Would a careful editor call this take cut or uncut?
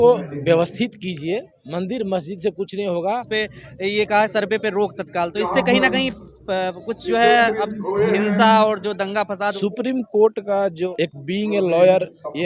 cut